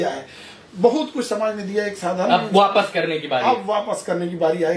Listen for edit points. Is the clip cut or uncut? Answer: uncut